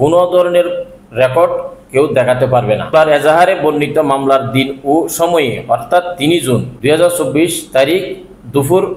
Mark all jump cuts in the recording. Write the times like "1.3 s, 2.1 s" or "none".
2.9 s, 6.7 s